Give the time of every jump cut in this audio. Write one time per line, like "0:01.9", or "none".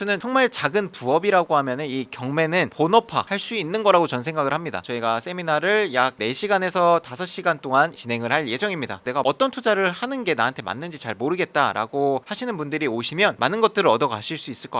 0:04.9
0:09.0